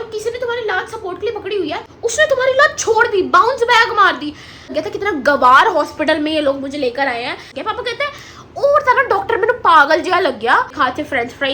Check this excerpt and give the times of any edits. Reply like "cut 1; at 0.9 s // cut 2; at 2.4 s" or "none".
cut 1; at 1.9 s // cut 2; at 4.7 s // cut 3; at 7.6 s // cut 4; at 10.8 s